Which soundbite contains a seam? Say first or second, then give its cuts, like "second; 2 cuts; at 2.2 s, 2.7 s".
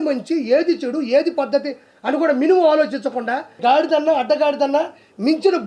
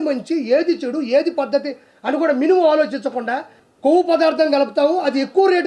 second; 1 cut; at 3.5 s